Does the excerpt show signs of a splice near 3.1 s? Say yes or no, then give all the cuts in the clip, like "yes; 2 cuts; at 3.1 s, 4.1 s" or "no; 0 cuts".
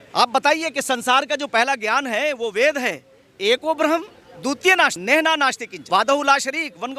no; 2 cuts; at 5.0 s, 5.7 s